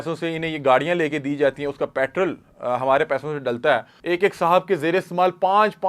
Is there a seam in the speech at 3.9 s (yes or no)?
yes